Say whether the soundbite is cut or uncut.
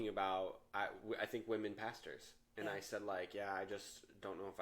uncut